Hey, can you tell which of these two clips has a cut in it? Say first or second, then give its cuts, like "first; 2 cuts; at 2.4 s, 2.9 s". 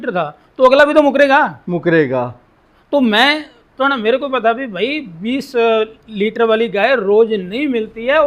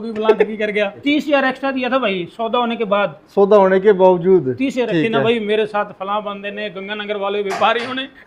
second; 2 cuts; at 1.0 s, 4.9 s